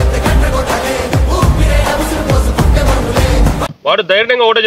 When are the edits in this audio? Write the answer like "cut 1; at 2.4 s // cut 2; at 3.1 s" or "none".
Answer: cut 1; at 3.7 s